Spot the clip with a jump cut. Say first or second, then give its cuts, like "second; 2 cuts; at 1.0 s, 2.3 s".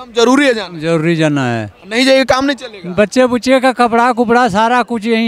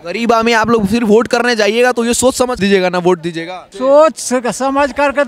second; 2 cuts; at 2.6 s, 3.7 s